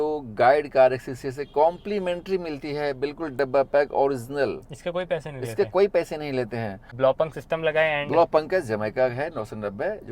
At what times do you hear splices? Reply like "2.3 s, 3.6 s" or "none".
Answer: 6.8 s